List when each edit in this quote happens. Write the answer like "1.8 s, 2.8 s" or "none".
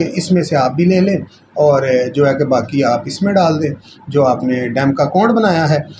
none